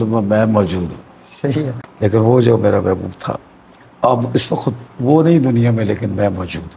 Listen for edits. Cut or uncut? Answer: cut